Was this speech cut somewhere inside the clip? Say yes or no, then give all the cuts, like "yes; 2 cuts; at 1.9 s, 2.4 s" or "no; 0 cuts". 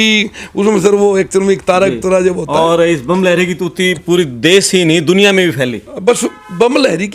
no; 0 cuts